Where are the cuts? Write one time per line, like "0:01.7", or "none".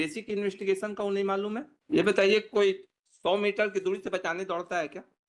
0:01.7